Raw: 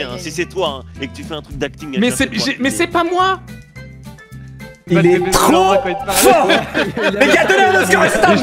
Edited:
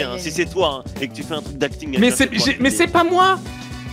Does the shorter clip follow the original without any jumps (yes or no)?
yes